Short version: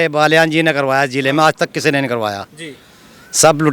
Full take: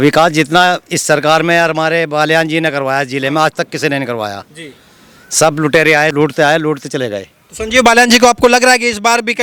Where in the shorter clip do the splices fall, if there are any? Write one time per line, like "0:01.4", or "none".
none